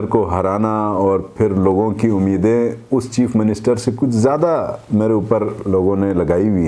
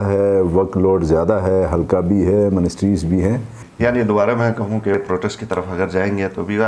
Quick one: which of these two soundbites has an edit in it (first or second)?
second